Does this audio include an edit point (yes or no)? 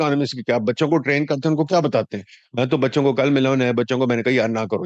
no